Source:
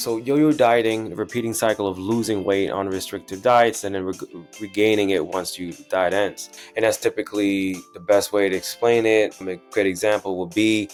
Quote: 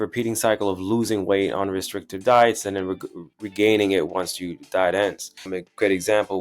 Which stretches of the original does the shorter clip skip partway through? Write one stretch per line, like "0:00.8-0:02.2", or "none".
0:06.6-0:09.4